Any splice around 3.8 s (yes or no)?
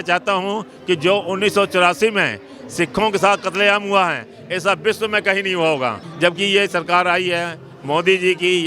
no